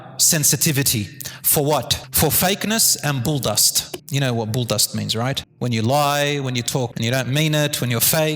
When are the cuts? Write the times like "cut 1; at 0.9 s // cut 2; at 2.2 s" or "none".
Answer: cut 1; at 2.0 s // cut 2; at 5.5 s // cut 3; at 6.9 s